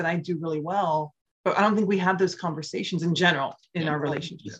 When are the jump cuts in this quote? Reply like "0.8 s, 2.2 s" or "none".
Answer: 1.2 s